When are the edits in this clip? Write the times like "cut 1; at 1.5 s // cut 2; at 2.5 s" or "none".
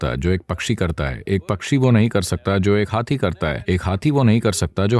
none